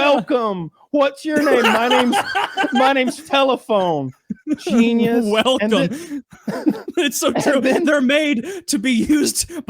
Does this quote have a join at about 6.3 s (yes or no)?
no